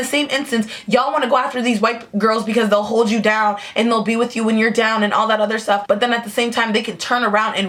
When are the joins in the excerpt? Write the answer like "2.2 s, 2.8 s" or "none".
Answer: none